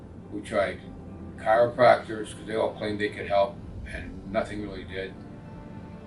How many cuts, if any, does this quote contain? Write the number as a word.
zero